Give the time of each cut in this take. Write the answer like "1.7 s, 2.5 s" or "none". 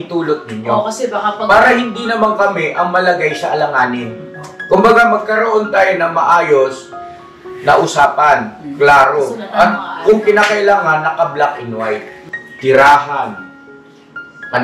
12.2 s